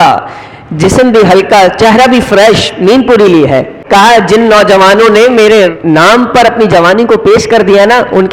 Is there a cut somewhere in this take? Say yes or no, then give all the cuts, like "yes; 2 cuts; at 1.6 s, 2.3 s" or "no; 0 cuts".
yes; 2 cuts; at 3.7 s, 5.7 s